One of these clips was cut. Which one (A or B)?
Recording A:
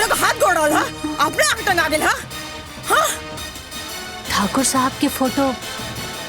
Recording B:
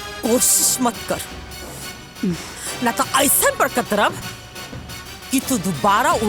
A